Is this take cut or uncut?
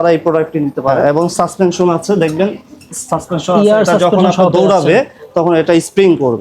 cut